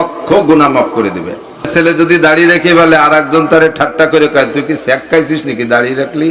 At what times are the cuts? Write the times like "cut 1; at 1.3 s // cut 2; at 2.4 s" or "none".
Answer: cut 1; at 1.6 s